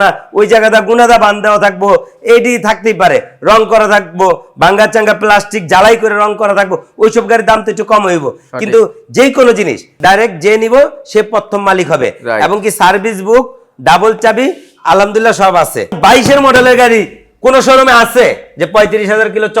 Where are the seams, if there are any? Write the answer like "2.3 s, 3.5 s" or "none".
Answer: 9.9 s, 16.0 s